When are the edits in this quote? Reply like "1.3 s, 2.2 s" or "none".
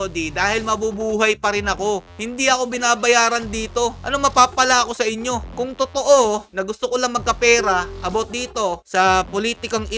none